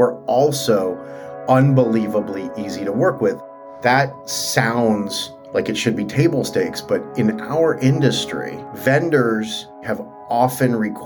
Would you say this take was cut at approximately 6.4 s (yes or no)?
no